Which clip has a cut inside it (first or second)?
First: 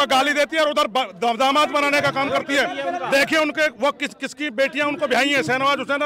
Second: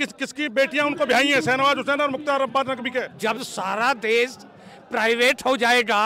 second